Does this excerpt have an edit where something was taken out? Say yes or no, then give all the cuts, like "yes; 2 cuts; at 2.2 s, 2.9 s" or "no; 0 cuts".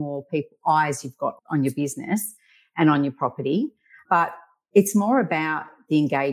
no; 0 cuts